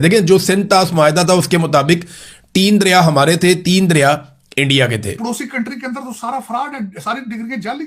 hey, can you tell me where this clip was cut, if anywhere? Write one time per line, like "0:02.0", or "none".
0:05.2